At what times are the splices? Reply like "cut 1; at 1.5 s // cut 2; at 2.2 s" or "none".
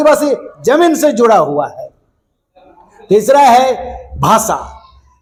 none